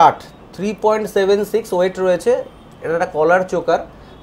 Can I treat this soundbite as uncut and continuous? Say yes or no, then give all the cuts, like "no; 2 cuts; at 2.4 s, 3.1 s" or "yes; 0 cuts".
yes; 0 cuts